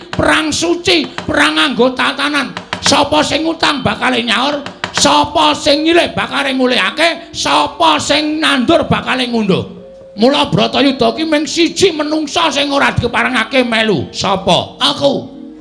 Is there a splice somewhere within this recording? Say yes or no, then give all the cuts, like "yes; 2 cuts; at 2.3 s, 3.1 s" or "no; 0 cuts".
no; 0 cuts